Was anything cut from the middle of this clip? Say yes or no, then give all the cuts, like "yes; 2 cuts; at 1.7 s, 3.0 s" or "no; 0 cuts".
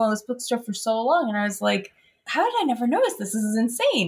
yes; 1 cut; at 2.3 s